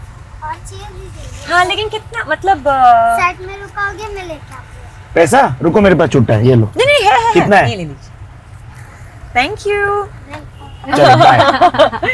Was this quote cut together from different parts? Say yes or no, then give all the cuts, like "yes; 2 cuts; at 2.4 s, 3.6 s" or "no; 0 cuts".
no; 0 cuts